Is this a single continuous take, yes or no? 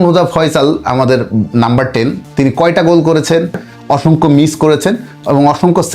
no